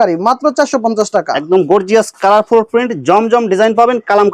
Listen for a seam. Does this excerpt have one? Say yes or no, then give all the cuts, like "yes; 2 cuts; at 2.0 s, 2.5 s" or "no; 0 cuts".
no; 0 cuts